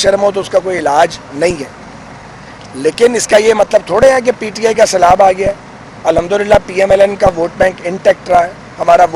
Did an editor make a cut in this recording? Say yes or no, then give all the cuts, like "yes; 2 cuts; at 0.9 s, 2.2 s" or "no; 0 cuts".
no; 0 cuts